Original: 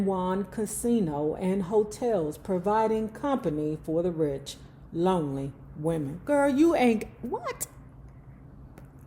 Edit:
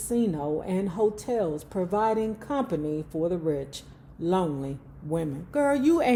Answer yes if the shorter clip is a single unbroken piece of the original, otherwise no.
yes